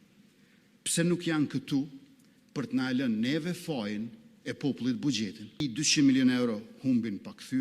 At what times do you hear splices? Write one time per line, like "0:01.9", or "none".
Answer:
0:05.6